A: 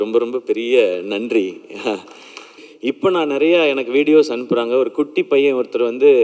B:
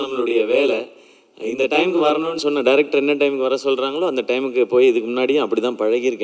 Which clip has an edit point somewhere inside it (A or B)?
A